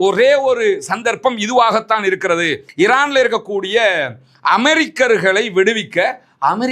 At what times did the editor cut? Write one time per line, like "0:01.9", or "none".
0:02.6

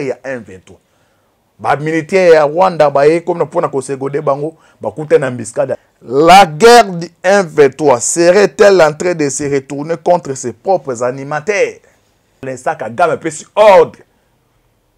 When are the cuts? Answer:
0:05.9
0:12.4

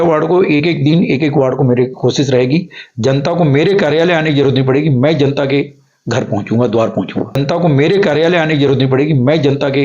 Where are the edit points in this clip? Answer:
0:07.4

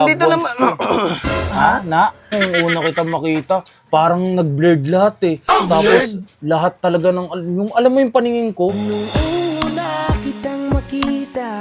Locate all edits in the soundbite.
0:02.3

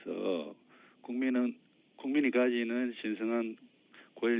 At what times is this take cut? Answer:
0:03.5

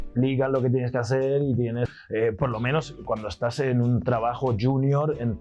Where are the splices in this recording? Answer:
0:01.9

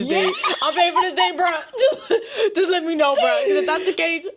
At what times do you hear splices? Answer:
none

